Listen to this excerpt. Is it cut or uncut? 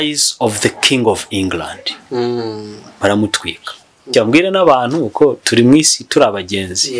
cut